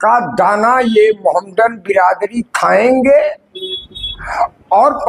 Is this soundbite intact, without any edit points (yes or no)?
yes